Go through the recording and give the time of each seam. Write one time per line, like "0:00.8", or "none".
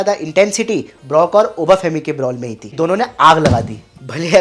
0:02.6